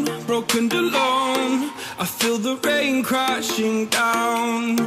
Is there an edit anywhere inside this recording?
no; 0 cuts

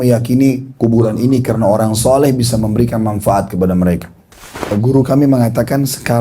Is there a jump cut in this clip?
yes; 1 cut; at 4.7 s

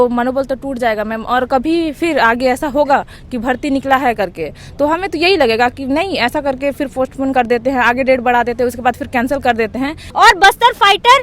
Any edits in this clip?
yes; 1 cut; at 10.0 s

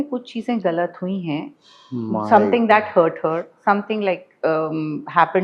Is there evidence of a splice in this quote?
no; 0 cuts

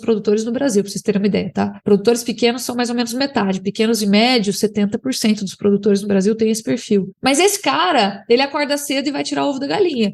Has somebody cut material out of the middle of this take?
no; 0 cuts

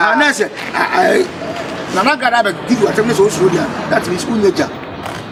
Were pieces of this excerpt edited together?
no; 0 cuts

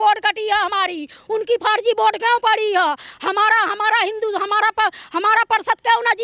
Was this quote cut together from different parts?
no; 0 cuts

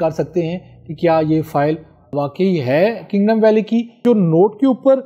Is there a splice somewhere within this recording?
yes; 2 cuts; at 2.1 s, 4.0 s

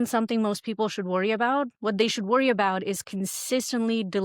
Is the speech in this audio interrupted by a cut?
no; 0 cuts

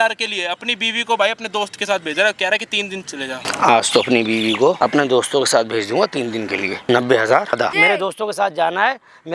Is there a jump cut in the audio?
yes; 4 cuts; at 3.5 s, 4.8 s, 6.8 s, 7.6 s

